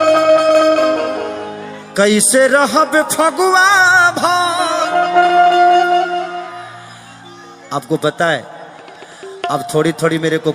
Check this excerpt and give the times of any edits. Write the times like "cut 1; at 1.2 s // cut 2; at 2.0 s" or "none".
none